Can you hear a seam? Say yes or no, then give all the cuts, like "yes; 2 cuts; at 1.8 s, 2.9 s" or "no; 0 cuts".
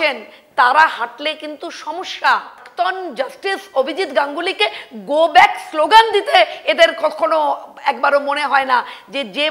yes; 1 cut; at 2.7 s